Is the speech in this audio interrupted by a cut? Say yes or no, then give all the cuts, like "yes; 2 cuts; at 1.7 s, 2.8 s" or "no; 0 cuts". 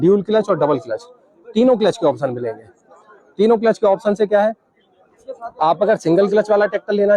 no; 0 cuts